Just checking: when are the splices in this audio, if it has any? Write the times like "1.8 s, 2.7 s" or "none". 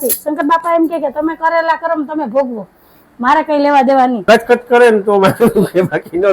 4.2 s